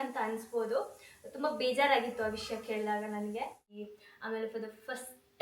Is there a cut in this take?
yes; 1 cut; at 3.9 s

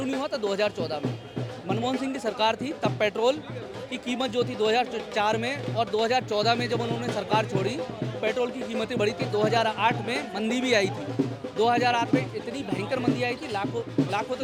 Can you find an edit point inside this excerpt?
no; 0 cuts

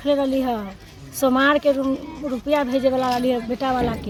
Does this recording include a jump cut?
no; 0 cuts

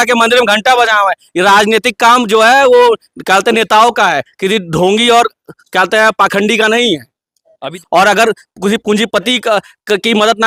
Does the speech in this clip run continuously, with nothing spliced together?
no; 1 cut; at 7.8 s

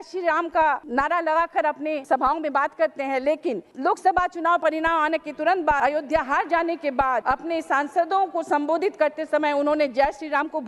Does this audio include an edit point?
yes; 5 cuts; at 0.8 s, 2.0 s, 3.7 s, 5.8 s, 7.2 s

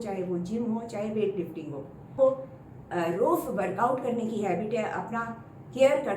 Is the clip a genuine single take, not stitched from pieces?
no; 1 cut; at 2.1 s

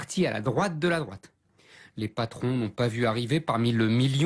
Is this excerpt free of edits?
no; 1 cut; at 2.4 s

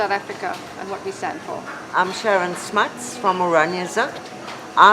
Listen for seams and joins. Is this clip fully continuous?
no; 1 cut; at 3.4 s

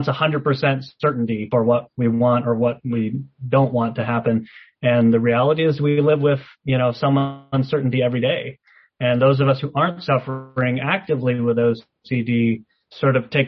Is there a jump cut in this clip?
yes; 1 cut; at 1.5 s

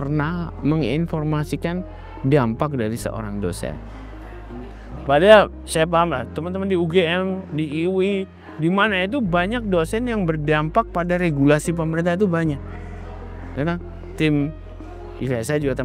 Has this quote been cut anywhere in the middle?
no; 0 cuts

